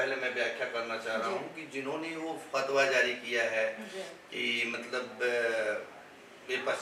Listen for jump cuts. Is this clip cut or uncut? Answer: uncut